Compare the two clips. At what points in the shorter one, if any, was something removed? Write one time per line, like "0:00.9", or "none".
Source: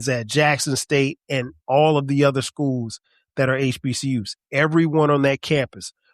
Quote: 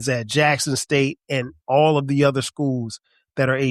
none